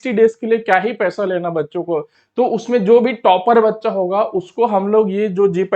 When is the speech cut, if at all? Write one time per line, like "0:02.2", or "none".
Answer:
0:02.1

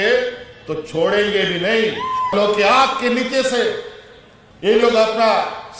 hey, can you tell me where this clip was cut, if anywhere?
0:02.3

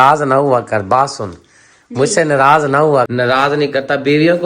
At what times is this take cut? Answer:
0:03.1

